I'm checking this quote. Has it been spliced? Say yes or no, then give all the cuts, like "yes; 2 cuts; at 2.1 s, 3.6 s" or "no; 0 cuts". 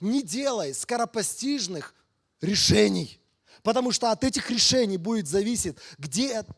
no; 0 cuts